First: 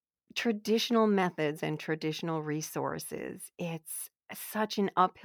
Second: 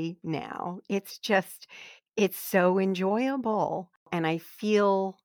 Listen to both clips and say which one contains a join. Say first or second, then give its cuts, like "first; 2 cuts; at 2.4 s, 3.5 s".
second; 1 cut; at 4.1 s